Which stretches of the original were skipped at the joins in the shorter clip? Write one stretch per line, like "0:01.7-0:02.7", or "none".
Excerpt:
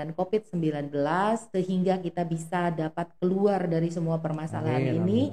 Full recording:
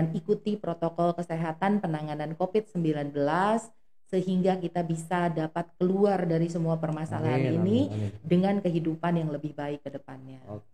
0:03.7-0:04.0